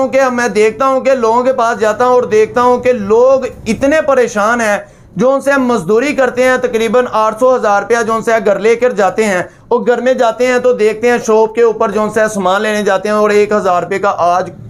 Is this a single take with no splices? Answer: yes; 0 cuts

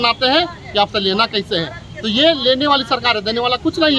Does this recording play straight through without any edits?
yes; 0 cuts

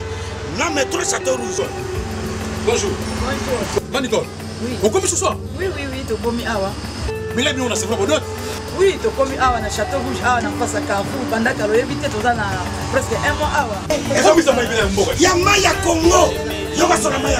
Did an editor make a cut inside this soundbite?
no; 0 cuts

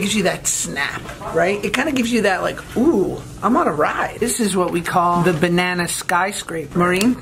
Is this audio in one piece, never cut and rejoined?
no; 1 cut; at 4.2 s

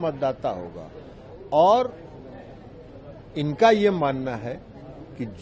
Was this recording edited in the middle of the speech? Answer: no; 0 cuts

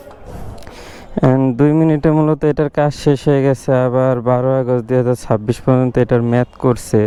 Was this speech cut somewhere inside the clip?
no; 0 cuts

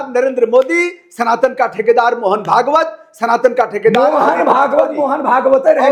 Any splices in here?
no; 0 cuts

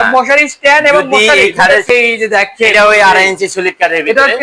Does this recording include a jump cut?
yes; 1 cut; at 1.9 s

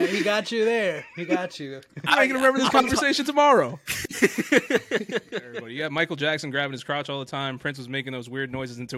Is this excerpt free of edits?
no; 1 cut; at 5.6 s

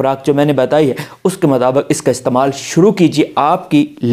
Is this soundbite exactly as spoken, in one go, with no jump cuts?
yes; 0 cuts

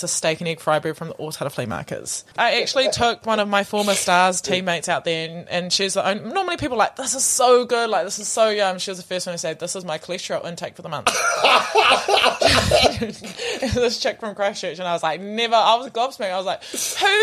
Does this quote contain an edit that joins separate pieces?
yes; 1 cut; at 2.4 s

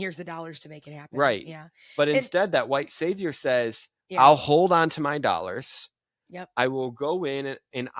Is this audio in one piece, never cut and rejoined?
yes; 0 cuts

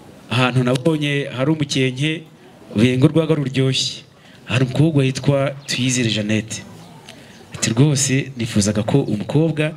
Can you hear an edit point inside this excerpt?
no; 0 cuts

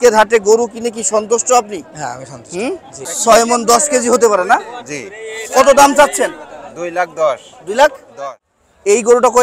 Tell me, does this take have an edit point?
yes; 2 cuts; at 3.0 s, 8.1 s

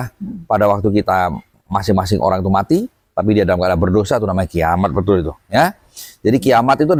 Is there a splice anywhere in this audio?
no; 0 cuts

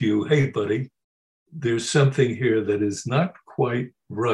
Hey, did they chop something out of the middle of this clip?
no; 0 cuts

